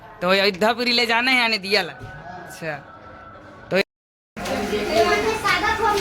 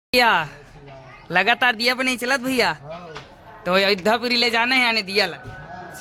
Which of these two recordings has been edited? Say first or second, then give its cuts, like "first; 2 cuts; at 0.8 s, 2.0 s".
first; 1 cut; at 3.8 s